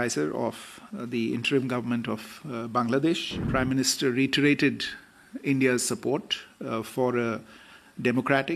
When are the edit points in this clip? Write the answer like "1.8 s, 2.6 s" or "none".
3.4 s